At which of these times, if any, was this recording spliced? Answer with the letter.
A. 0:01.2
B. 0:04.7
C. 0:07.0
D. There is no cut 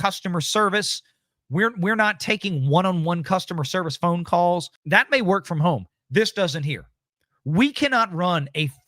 B